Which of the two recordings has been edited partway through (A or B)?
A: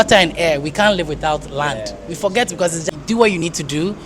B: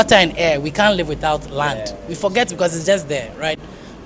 A